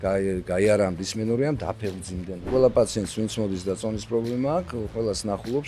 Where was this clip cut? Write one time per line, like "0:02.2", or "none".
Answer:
0:02.5